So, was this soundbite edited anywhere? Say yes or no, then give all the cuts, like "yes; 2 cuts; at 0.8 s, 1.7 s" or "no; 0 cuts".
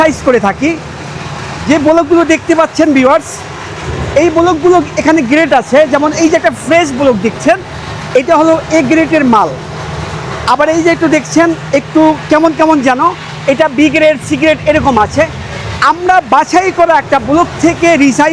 no; 0 cuts